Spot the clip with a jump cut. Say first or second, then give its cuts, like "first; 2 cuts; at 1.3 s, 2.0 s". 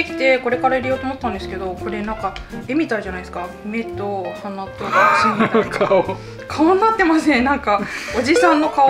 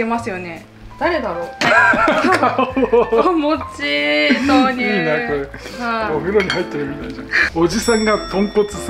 second; 2 cuts; at 1.6 s, 7.4 s